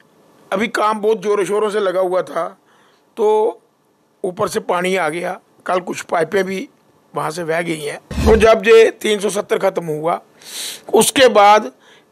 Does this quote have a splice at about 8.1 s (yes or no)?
yes